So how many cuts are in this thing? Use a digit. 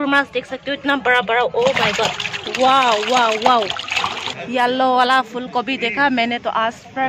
1